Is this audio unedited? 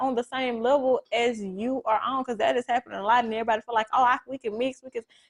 yes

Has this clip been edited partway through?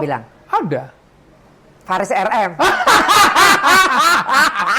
no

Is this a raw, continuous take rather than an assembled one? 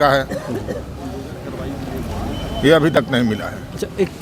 yes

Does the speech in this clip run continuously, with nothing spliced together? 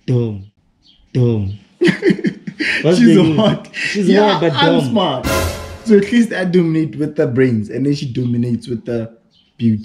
yes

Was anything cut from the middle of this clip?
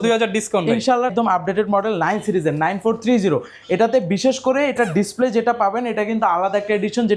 yes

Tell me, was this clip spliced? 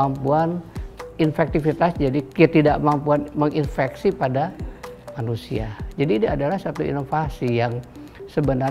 yes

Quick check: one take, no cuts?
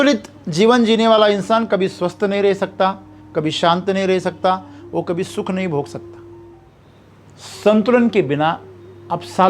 no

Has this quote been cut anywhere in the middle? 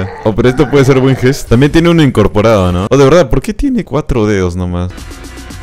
yes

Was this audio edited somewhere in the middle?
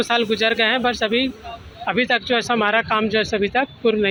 no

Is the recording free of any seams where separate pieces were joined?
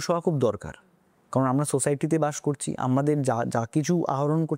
yes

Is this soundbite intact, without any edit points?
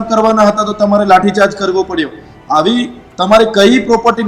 yes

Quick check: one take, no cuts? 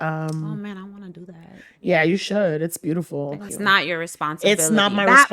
no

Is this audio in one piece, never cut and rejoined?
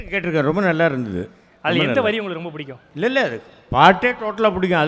yes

